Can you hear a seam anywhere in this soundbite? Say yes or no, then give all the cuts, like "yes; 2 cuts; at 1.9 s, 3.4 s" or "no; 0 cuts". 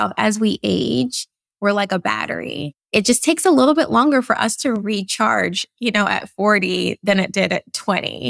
yes; 1 cut; at 2.9 s